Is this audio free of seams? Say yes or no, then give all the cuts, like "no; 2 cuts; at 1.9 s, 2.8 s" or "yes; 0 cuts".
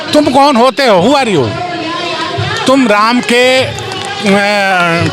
yes; 0 cuts